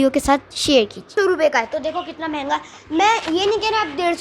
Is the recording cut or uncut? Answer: cut